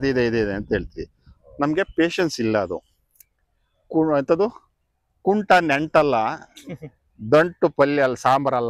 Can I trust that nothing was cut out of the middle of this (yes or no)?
yes